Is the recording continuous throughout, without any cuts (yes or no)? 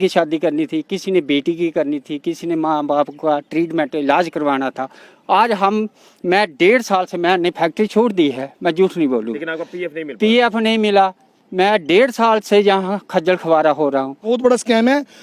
no